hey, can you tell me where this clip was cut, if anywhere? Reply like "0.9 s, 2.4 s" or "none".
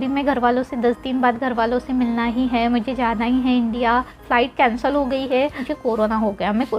4.2 s, 5.7 s